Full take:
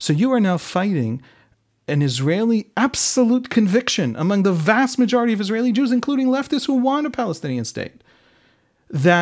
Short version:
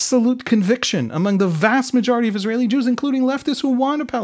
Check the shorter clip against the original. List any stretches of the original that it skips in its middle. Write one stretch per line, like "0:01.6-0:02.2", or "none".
none